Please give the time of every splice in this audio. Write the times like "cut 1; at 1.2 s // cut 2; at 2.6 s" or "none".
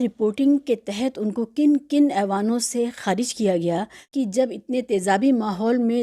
cut 1; at 4.1 s